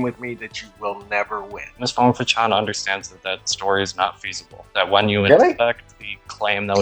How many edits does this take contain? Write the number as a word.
one